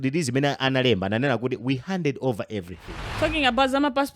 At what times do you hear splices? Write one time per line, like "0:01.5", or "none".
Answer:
0:03.0